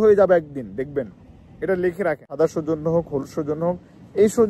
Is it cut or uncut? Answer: cut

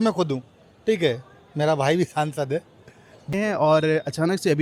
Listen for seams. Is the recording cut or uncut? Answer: cut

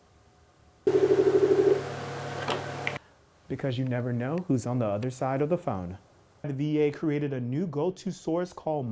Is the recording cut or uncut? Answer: cut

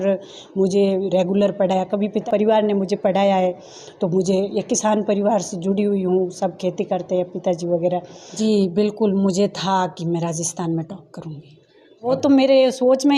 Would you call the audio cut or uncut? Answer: cut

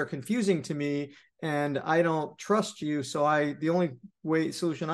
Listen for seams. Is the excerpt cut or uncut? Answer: uncut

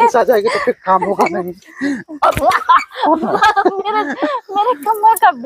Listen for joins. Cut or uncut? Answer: uncut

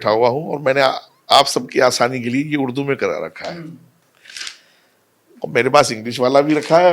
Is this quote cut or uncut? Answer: uncut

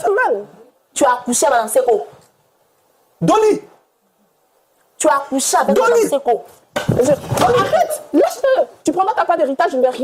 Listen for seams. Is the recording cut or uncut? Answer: cut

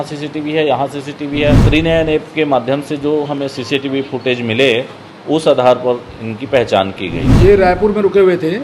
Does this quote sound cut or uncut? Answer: cut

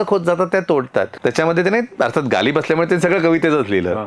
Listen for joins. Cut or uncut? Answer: cut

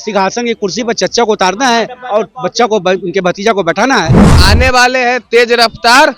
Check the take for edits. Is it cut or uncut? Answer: cut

